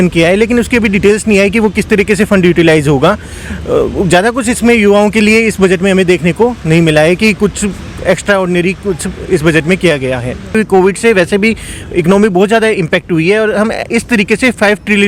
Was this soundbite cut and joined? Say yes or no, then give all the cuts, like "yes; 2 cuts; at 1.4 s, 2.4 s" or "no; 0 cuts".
yes; 1 cut; at 10.5 s